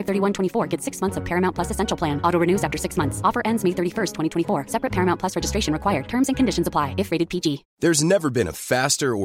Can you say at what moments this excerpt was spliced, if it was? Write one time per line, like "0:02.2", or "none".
0:07.7